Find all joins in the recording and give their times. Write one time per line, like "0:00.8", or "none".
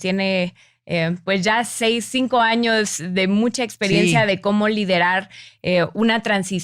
none